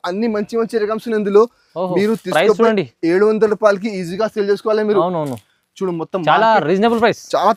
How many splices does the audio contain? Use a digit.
0